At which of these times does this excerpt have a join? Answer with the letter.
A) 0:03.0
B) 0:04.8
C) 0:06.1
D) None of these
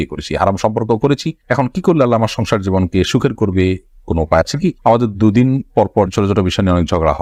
D